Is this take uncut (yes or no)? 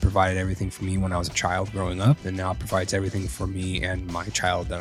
yes